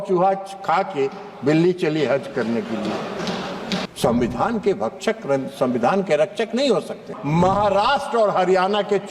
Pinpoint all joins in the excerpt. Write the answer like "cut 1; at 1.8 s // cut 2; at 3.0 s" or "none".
cut 1; at 3.9 s // cut 2; at 7.1 s